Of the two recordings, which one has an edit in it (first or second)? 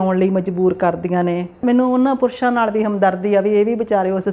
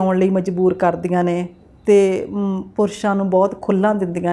first